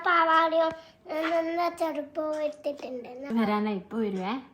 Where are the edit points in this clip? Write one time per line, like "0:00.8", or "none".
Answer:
0:03.2